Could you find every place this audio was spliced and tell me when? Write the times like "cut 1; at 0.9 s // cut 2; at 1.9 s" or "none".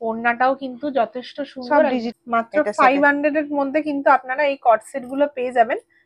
cut 1; at 2.1 s